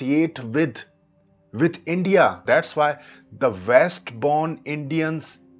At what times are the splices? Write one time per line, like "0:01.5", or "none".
0:02.4